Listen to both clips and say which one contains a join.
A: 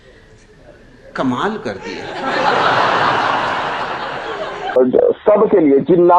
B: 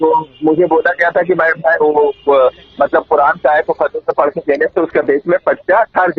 A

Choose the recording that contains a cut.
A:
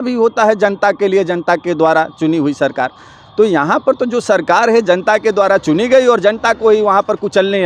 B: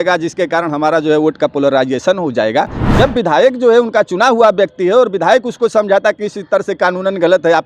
B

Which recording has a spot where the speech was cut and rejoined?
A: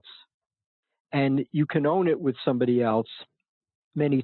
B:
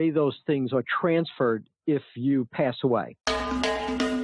B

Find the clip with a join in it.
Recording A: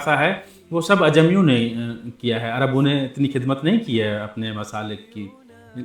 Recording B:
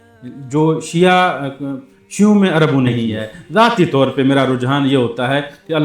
B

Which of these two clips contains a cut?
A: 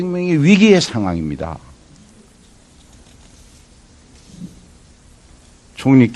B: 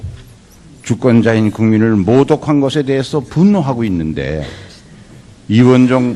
B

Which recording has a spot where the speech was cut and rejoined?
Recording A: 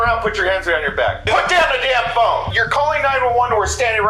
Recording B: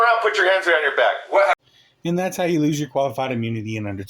A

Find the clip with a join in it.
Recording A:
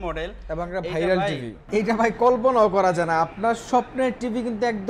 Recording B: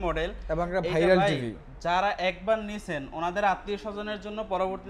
A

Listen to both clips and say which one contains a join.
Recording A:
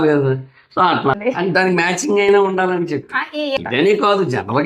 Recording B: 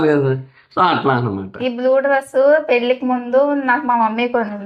A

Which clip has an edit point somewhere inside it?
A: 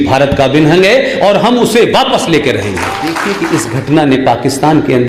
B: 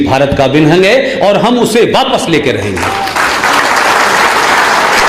A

